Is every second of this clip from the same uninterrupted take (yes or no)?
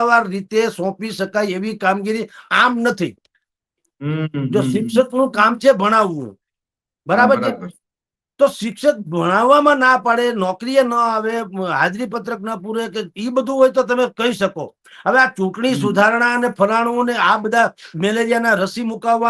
yes